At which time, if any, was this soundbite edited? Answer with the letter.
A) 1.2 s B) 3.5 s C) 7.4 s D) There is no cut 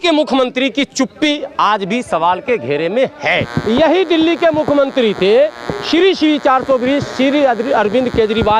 B